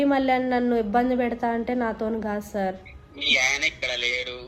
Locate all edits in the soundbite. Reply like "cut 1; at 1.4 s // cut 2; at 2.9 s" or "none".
none